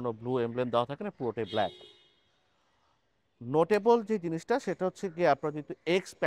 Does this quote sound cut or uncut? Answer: uncut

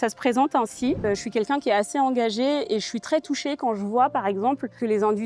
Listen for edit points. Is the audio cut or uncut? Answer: cut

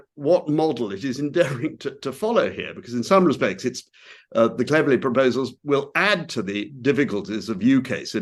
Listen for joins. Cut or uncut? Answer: uncut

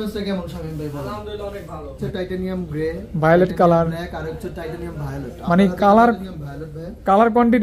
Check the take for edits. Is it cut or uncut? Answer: cut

